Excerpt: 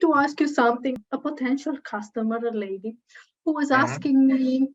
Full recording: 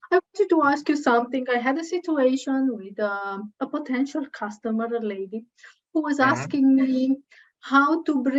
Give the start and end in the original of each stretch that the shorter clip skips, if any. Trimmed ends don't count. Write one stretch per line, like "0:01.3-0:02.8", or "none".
0:01.4-0:03.4